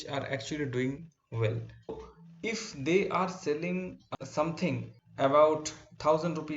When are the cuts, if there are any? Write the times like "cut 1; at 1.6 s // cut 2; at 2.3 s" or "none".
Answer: cut 1; at 2.0 s // cut 2; at 4.0 s // cut 3; at 5.0 s

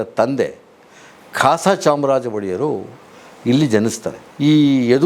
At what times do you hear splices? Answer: cut 1; at 4.1 s

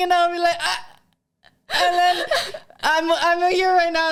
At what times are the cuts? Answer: none

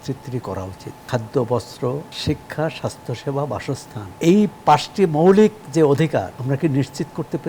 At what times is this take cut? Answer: cut 1; at 1.0 s // cut 2; at 2.1 s // cut 3; at 4.0 s // cut 4; at 6.4 s

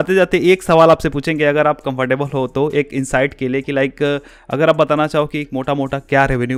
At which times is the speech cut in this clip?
none

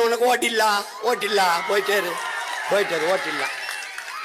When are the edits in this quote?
none

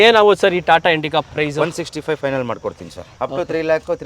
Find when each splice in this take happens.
cut 1; at 3.1 s

